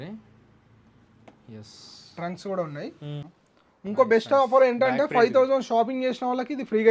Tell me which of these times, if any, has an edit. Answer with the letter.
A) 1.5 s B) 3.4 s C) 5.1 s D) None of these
B